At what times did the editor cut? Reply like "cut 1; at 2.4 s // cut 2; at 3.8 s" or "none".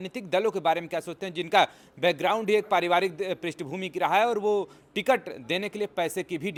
none